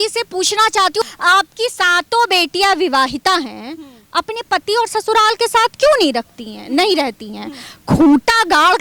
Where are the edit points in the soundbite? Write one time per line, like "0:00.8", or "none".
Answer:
0:01.0